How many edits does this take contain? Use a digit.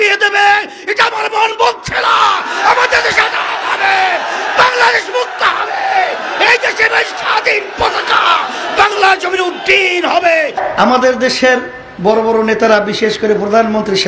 1